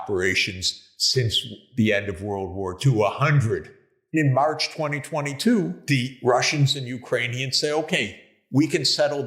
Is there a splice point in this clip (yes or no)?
yes